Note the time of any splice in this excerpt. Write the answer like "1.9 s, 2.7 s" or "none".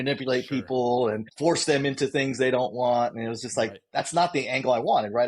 1.3 s